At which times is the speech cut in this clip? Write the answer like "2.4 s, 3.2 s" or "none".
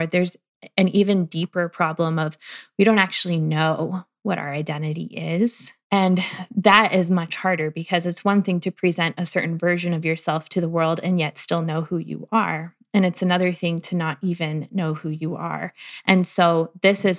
5.9 s